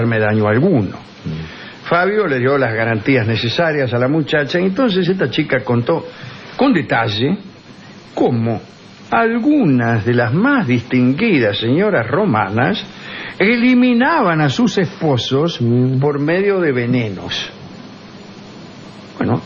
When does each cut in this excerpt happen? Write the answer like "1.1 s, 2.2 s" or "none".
4.0 s